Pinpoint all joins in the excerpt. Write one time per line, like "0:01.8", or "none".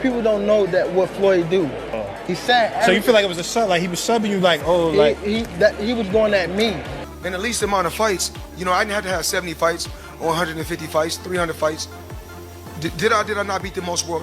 0:06.9